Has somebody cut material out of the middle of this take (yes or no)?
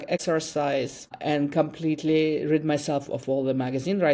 yes